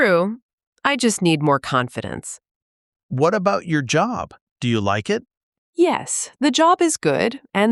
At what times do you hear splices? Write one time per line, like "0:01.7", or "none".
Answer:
0:02.3
0:05.3